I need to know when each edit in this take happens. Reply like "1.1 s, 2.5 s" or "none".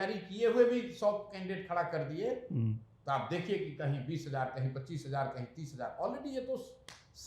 none